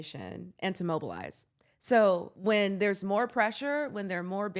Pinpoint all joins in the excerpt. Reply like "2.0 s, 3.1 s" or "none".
2.3 s